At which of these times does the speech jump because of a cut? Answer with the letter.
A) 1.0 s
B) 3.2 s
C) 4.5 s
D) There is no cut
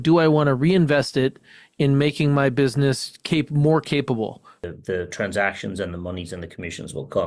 C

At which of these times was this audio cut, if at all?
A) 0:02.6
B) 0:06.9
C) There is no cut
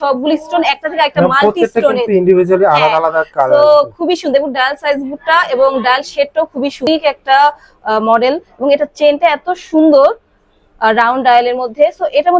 B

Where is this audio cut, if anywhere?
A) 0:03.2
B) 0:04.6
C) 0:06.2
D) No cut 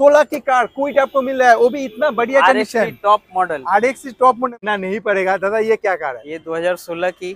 B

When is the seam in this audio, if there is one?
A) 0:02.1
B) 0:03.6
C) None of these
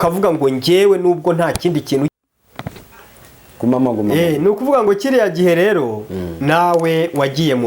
A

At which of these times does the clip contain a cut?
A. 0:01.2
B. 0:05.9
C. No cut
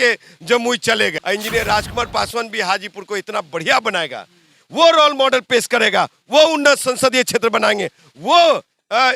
A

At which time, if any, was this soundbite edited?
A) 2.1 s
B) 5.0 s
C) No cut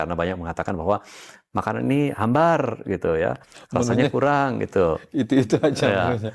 C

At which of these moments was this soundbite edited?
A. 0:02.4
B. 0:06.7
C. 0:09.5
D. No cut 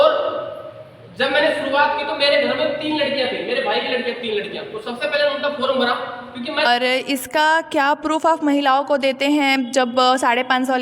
B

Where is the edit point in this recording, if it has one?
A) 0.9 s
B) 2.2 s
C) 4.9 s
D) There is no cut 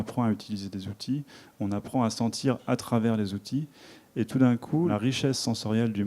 C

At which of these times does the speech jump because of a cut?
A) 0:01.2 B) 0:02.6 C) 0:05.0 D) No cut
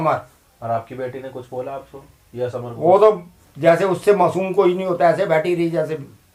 D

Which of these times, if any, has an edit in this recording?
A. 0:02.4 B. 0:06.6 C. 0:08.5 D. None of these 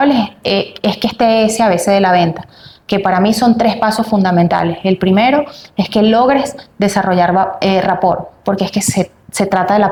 D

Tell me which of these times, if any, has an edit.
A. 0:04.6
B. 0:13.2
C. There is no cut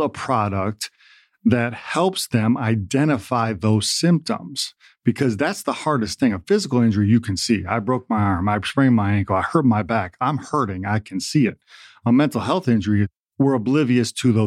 B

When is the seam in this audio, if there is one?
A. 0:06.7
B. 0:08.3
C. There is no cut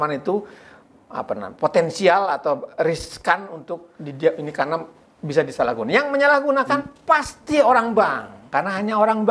B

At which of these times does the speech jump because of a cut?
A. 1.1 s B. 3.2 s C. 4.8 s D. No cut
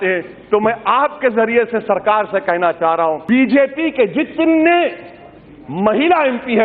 B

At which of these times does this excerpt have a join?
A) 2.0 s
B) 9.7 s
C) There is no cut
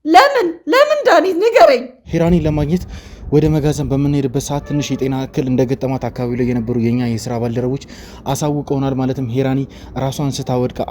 A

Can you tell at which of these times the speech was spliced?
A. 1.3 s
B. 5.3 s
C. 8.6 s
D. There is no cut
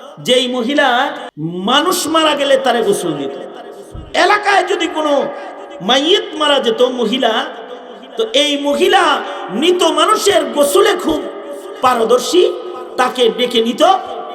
A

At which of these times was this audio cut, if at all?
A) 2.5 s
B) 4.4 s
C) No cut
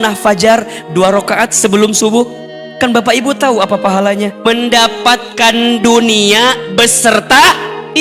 B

